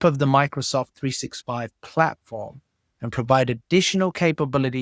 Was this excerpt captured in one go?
yes; 0 cuts

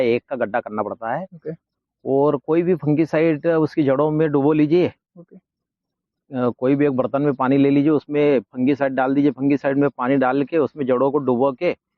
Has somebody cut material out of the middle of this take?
no; 0 cuts

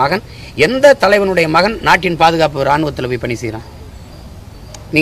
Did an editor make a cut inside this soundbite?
no; 0 cuts

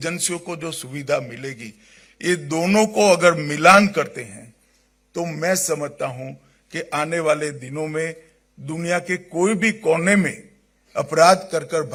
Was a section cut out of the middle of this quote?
no; 0 cuts

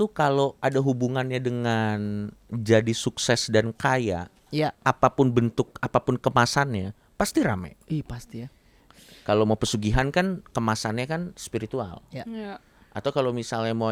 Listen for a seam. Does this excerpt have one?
no; 0 cuts

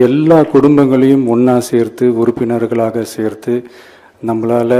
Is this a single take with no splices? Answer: yes; 0 cuts

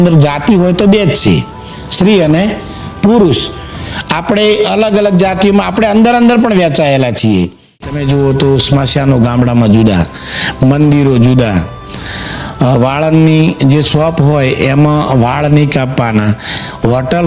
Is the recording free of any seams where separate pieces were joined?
no; 1 cut; at 7.9 s

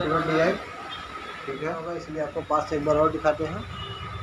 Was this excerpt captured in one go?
no; 1 cut; at 2.1 s

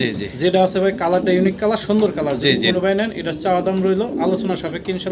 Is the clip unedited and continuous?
yes; 0 cuts

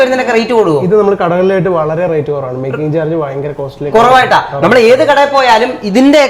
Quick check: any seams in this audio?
no; 0 cuts

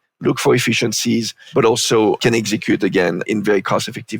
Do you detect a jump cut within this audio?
yes; 3 cuts; at 1.4 s, 2.2 s, 3.2 s

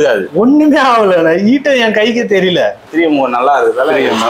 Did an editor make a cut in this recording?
yes; 1 cut; at 2.8 s

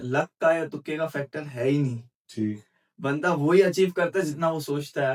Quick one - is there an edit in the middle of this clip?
no; 0 cuts

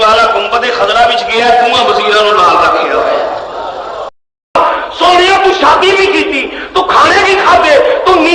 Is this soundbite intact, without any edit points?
no; 1 cut; at 4.6 s

